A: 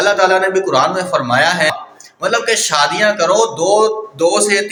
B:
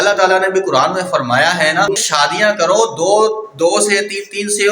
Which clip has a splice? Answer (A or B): B